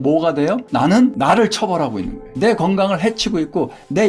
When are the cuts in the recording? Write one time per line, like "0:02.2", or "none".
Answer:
0:02.2